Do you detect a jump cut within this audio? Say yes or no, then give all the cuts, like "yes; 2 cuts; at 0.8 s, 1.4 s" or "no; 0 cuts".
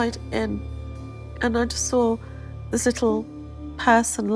no; 0 cuts